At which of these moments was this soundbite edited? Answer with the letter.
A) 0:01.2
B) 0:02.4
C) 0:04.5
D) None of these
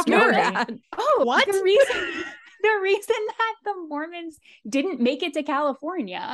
A